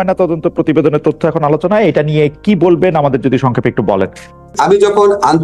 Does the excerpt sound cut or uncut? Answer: cut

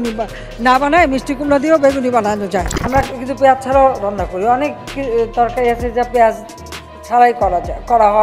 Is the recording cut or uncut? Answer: cut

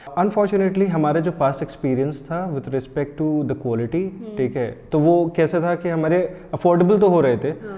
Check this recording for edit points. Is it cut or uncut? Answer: uncut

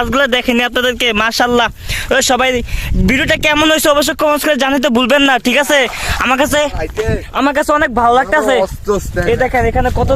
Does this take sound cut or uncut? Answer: uncut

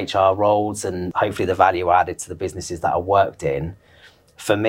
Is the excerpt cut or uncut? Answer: cut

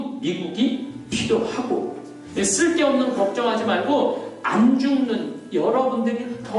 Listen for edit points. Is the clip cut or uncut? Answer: cut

